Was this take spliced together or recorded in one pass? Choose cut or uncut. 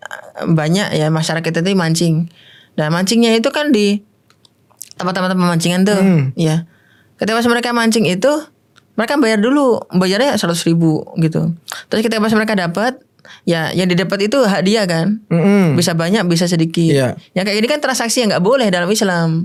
uncut